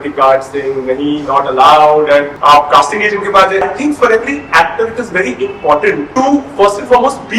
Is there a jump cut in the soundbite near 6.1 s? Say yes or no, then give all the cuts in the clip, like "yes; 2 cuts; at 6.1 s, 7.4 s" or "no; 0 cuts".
yes; 3 cuts; at 2.3 s, 3.6 s, 6.1 s